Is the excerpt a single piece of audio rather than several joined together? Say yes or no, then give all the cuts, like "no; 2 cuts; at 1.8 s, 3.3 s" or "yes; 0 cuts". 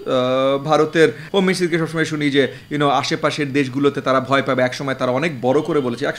no; 1 cut; at 1.2 s